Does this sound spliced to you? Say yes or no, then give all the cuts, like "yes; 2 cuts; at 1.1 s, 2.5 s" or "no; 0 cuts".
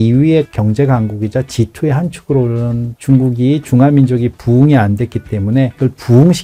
no; 0 cuts